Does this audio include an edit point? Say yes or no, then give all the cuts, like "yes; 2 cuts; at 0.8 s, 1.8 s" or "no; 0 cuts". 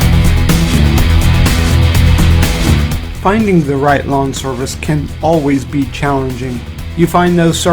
yes; 1 cut; at 5.5 s